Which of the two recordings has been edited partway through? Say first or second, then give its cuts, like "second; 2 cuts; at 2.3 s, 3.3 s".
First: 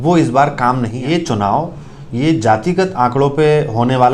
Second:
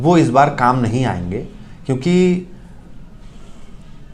first; 1 cut; at 1.0 s